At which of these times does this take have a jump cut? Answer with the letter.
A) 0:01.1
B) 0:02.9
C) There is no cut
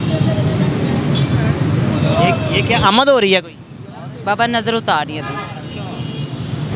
A